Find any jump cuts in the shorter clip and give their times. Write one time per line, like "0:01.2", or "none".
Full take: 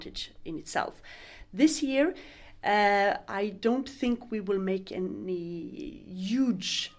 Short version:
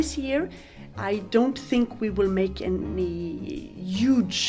0:00.9